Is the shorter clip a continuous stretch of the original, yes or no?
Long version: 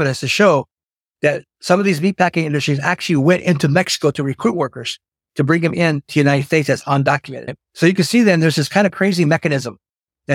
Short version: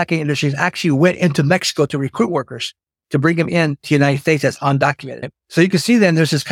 yes